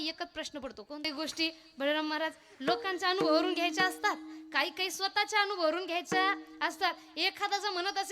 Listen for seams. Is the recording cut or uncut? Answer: cut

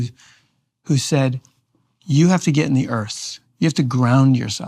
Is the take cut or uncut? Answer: uncut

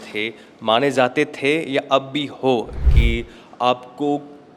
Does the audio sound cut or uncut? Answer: cut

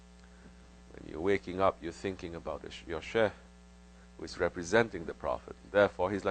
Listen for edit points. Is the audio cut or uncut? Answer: uncut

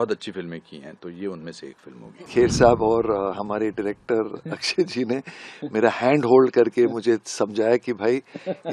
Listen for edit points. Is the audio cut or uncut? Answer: cut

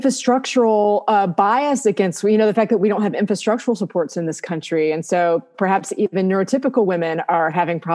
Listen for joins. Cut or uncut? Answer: uncut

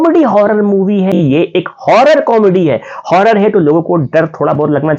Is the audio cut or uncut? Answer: cut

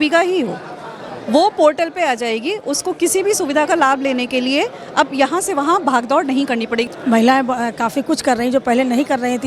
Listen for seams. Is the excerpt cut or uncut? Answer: cut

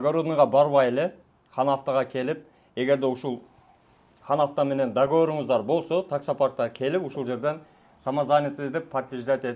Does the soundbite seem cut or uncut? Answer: uncut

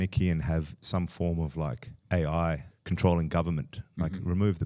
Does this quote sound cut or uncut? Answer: cut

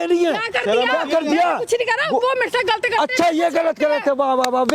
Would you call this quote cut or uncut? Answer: uncut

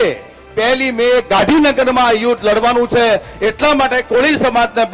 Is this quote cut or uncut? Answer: uncut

